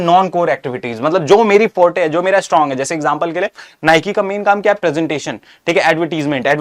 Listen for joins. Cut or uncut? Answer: uncut